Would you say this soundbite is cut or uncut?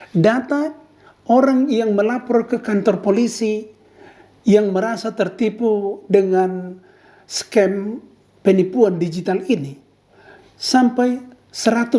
uncut